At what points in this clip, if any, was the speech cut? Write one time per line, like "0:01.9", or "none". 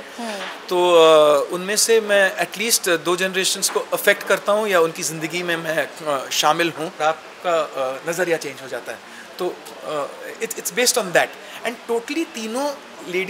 0:07.0

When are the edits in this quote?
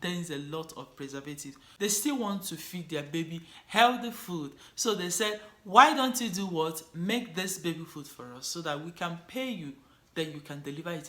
0:01.6

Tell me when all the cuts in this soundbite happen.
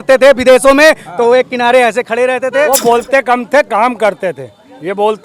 0:02.7

